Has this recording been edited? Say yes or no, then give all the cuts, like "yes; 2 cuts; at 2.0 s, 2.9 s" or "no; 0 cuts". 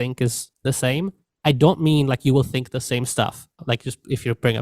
yes; 1 cut; at 3.6 s